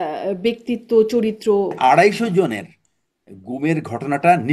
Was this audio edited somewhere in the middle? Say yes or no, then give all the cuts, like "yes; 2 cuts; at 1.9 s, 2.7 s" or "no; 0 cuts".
yes; 1 cut; at 1.8 s